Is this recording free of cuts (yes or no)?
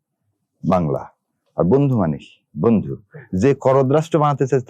yes